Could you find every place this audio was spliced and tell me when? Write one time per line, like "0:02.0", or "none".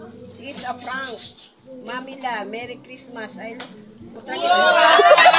none